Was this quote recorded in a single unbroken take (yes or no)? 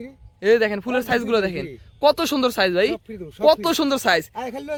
yes